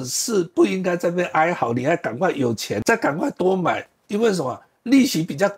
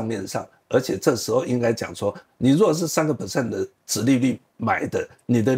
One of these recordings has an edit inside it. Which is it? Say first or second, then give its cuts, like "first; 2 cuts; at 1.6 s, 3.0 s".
first; 1 cut; at 2.8 s